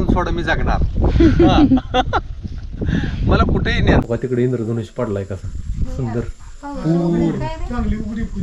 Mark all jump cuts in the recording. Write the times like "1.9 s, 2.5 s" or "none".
4.0 s